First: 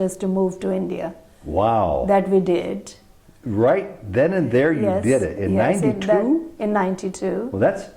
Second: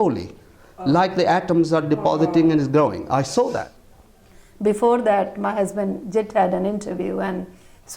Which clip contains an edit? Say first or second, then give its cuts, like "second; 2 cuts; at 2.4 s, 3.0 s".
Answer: second; 1 cut; at 3.6 s